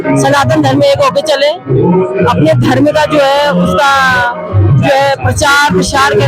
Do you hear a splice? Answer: no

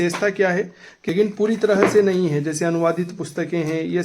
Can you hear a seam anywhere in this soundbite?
yes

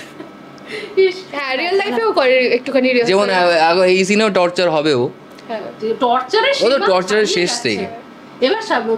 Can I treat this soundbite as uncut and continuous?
yes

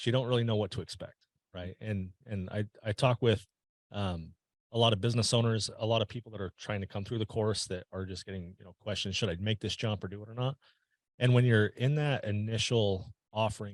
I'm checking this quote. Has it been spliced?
no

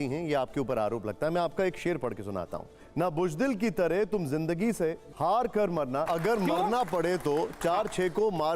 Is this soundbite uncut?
no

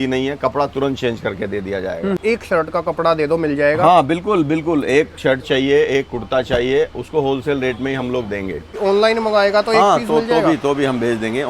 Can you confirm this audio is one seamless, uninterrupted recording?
no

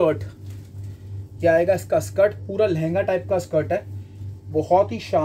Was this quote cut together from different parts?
no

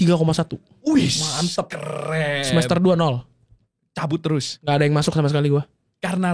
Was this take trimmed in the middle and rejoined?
no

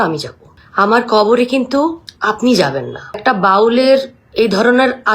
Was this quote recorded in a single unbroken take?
no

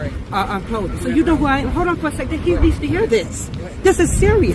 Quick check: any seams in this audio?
no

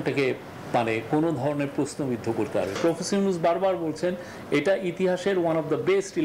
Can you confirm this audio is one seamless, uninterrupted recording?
no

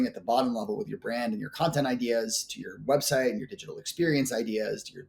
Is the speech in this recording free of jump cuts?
yes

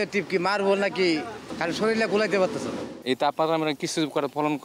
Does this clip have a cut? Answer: yes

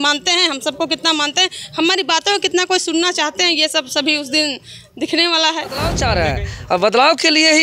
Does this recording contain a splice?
yes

